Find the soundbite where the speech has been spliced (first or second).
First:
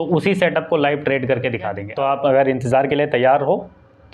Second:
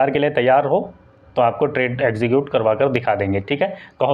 first